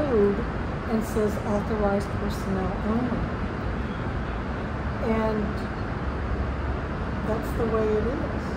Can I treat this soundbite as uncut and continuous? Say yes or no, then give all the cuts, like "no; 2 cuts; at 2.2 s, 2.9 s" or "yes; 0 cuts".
yes; 0 cuts